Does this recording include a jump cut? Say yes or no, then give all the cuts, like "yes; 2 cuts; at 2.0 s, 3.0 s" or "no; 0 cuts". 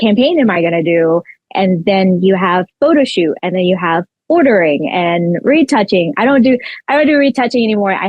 no; 0 cuts